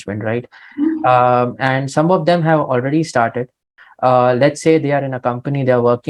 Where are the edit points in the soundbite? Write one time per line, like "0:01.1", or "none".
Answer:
0:03.8